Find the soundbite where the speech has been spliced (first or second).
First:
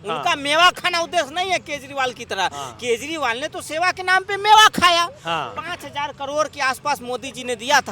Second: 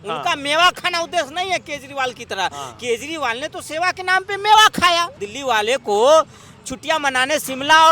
second